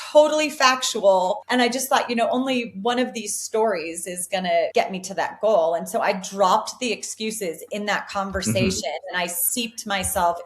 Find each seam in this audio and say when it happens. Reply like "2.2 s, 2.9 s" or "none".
1.4 s, 4.7 s

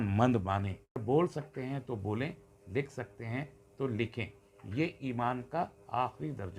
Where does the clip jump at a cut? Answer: 1.0 s

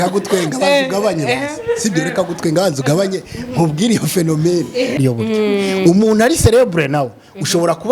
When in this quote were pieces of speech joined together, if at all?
5.0 s

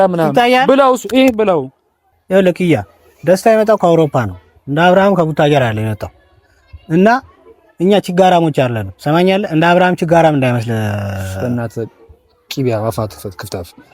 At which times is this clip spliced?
2.2 s

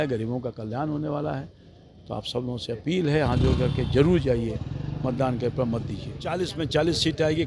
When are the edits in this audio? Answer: 6.3 s

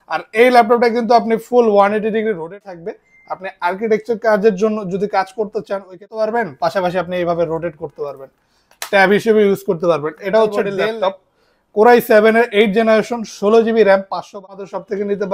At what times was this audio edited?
2.6 s, 6.1 s, 10.7 s, 14.4 s

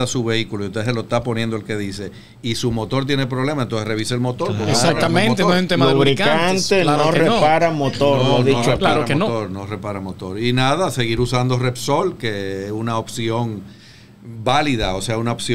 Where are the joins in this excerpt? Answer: none

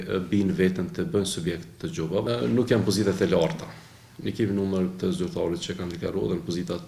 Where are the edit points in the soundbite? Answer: 2.2 s

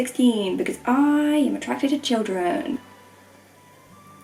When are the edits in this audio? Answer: none

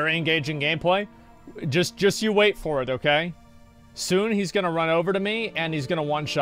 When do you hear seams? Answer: none

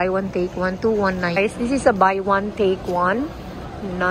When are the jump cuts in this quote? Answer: 1.4 s

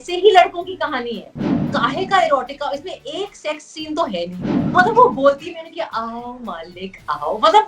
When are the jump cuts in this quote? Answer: 1.6 s, 4.6 s

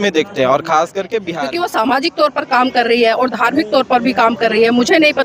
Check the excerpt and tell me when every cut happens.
1.3 s

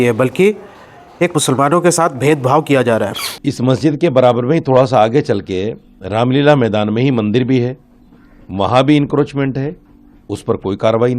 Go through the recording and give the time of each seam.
3.3 s

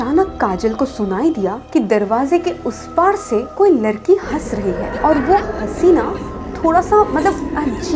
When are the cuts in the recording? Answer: none

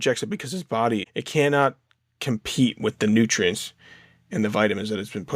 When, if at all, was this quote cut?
1.1 s

